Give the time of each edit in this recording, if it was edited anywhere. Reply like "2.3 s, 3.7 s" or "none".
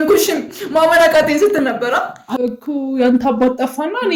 2.2 s